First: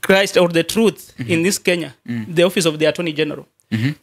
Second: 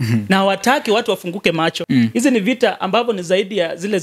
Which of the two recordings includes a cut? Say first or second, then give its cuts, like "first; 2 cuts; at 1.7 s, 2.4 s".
second; 1 cut; at 1.8 s